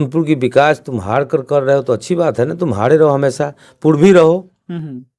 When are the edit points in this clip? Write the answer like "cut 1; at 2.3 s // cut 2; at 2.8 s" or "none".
none